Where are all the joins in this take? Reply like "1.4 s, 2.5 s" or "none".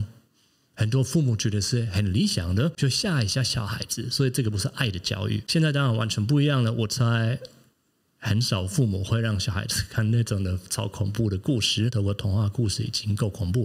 2.8 s, 5.4 s, 11.9 s